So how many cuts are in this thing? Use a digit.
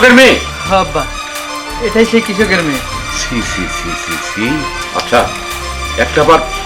0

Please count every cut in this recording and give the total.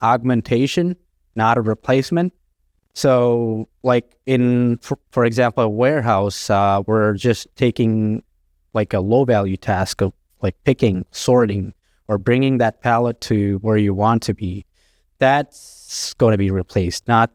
0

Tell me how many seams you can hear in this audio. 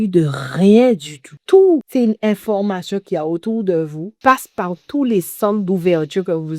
3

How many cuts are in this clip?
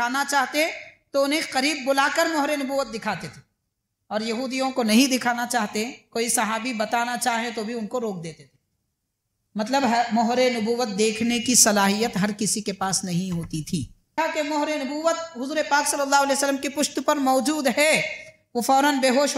1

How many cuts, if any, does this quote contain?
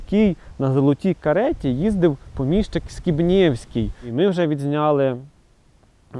1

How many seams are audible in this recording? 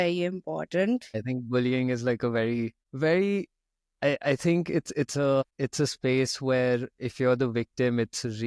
3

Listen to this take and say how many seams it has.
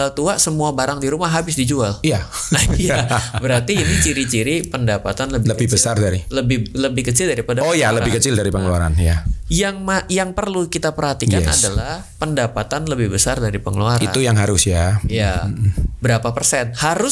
0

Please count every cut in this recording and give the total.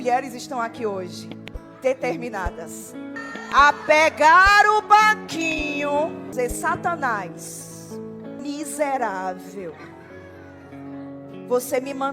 3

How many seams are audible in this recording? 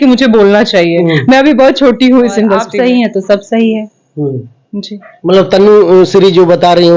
1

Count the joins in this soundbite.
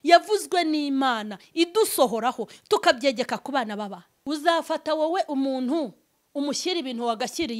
1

